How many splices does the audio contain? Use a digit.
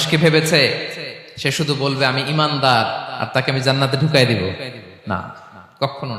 0